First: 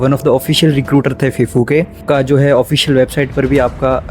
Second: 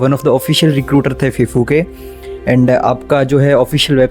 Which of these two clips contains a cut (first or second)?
first